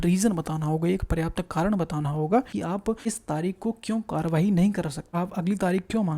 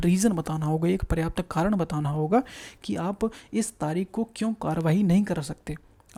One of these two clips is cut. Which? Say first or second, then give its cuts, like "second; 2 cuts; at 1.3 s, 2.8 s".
first; 2 cuts; at 2.8 s, 5.0 s